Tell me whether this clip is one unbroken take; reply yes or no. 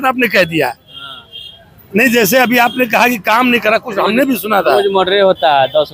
yes